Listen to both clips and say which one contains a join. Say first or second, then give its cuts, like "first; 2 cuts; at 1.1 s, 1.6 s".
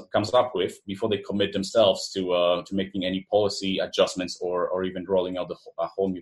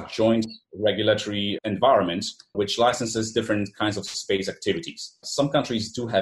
second; 3 cuts; at 1.5 s, 2.5 s, 5.2 s